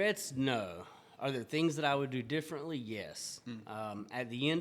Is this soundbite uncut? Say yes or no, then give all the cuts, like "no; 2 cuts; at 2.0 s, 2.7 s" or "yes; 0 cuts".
yes; 0 cuts